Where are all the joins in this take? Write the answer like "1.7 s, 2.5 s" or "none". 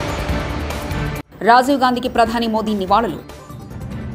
none